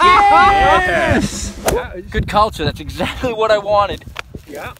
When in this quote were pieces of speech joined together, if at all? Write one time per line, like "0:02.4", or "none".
0:01.8